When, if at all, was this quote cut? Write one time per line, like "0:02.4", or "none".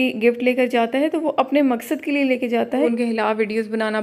0:02.9